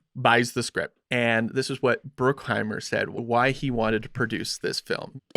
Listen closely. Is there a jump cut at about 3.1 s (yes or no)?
yes